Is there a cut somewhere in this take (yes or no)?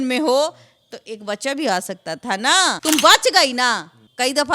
yes